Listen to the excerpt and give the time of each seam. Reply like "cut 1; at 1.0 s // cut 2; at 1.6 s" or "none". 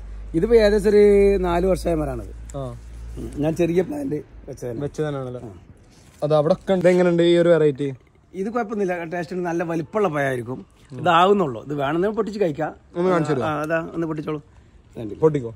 cut 1; at 6.8 s